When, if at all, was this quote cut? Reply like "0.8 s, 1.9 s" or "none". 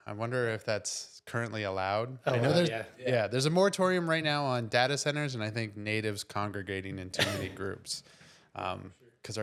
none